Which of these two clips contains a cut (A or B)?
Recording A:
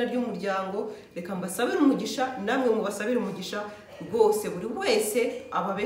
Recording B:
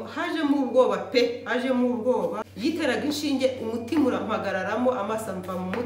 B